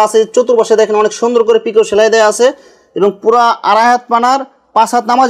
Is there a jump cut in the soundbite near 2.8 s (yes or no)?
no